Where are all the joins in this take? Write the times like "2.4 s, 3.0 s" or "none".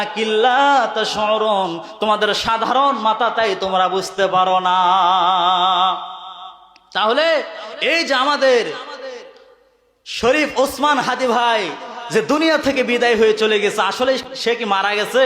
14.3 s